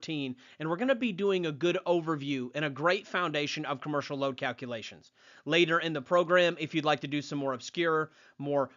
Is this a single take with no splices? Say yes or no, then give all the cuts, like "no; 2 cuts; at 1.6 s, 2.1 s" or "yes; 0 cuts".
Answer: yes; 0 cuts